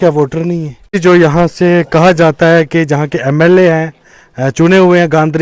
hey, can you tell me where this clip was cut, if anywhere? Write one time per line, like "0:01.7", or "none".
0:01.0